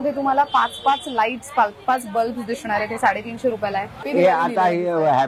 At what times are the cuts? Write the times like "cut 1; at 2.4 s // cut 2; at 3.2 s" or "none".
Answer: cut 1; at 4.0 s